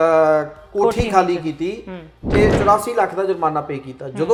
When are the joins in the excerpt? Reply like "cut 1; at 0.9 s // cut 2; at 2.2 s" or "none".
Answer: none